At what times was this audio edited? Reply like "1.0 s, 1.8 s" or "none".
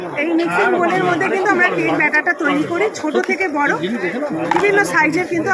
none